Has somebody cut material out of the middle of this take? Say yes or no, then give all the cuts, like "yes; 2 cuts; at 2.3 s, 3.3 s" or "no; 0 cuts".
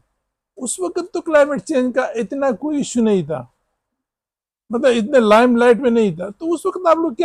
no; 0 cuts